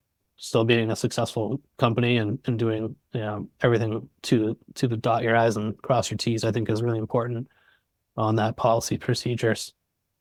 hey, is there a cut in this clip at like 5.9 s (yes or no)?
no